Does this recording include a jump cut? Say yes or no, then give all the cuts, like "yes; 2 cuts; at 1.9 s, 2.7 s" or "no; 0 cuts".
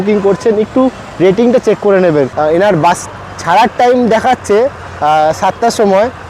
yes; 1 cut; at 2.3 s